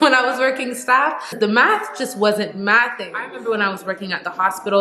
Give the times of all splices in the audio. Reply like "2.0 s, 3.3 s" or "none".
1.2 s, 3.3 s